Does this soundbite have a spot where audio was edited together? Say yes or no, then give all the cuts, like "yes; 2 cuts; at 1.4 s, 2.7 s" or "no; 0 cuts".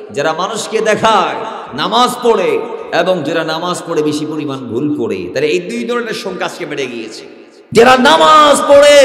yes; 1 cut; at 7.7 s